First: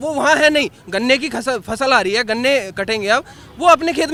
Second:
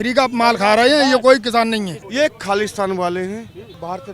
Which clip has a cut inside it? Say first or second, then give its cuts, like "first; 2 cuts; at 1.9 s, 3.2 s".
second; 1 cut; at 2.0 s